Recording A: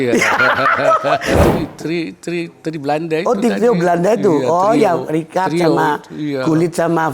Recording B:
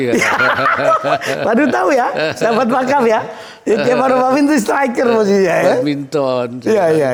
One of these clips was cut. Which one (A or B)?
A